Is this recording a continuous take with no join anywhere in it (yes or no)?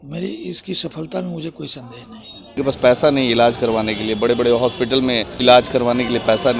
no